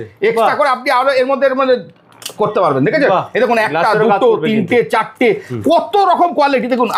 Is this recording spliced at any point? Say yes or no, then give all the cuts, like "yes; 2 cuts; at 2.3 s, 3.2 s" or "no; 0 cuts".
no; 0 cuts